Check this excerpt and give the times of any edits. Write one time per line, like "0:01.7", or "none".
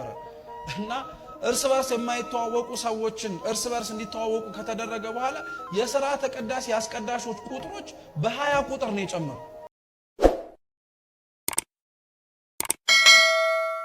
0:09.8